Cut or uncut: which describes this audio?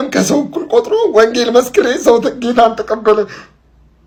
uncut